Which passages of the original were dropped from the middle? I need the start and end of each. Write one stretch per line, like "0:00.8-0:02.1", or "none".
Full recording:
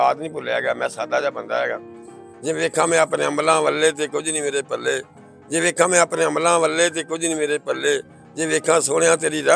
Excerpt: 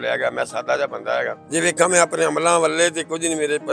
0:01.8-0:05.4